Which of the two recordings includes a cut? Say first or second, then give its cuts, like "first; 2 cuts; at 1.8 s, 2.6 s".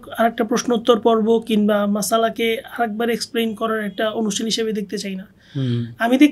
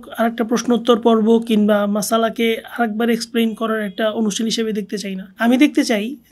second; 1 cut; at 5.3 s